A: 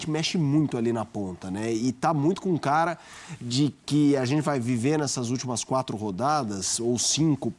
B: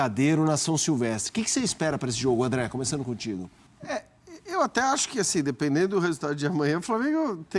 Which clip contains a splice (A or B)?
B